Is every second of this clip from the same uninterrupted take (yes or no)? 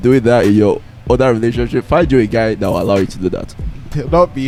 yes